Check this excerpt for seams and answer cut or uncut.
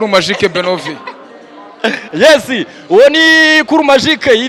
uncut